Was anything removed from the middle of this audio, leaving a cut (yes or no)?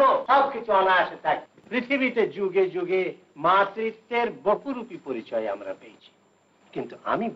yes